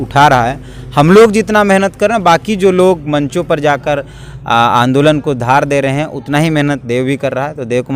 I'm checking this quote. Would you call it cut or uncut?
uncut